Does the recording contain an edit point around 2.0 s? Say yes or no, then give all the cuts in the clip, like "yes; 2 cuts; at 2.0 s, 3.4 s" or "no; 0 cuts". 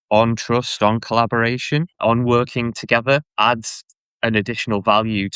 yes; 2 cuts; at 2.0 s, 3.3 s